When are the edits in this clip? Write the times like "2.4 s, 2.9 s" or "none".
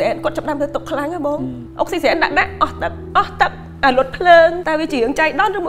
none